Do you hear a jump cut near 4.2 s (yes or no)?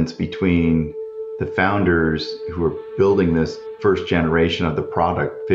no